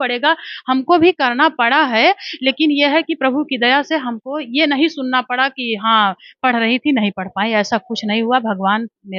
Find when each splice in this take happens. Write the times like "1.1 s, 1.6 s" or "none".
none